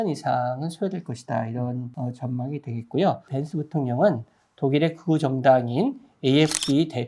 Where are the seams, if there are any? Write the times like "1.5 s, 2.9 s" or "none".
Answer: 1.9 s, 3.4 s